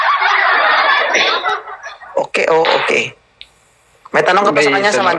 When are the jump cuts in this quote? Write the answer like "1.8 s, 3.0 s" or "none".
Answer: none